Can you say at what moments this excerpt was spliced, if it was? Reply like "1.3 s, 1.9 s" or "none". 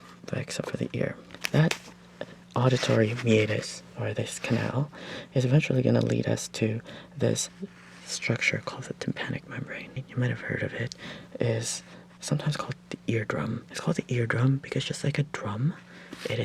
1.2 s, 10.0 s, 12.1 s, 13.7 s